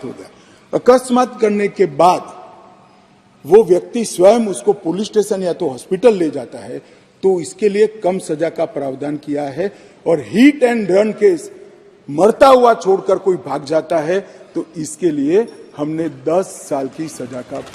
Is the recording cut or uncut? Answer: uncut